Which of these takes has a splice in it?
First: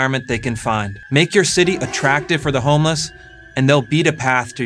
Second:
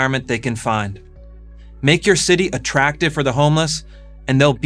first; 1 cut; at 1.0 s

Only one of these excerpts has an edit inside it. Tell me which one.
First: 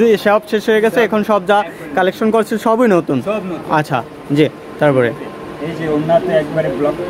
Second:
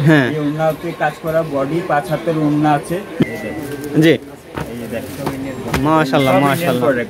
second; 1 cut; at 3.2 s

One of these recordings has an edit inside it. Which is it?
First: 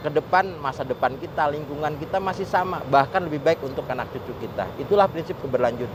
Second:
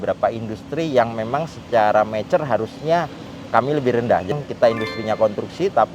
second; 1 cut; at 4.4 s

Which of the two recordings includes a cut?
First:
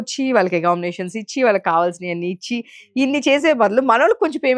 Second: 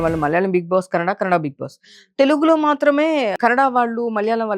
second; 1 cut; at 3.3 s

